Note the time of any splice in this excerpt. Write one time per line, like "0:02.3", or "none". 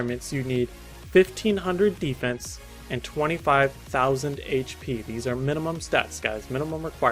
0:03.8